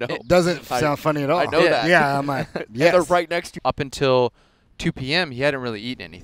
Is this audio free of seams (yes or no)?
no